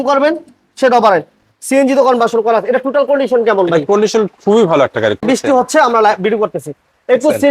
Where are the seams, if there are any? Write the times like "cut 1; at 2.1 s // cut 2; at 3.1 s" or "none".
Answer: cut 1; at 5.2 s